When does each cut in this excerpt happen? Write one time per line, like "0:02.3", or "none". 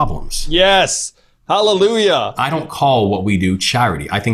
0:02.4